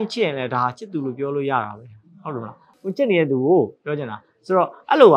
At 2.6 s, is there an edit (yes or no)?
yes